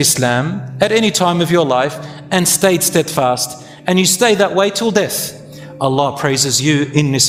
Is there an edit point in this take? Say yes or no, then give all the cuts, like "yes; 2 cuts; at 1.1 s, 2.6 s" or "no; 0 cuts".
no; 0 cuts